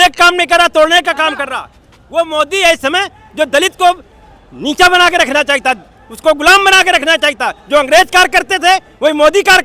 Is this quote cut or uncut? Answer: uncut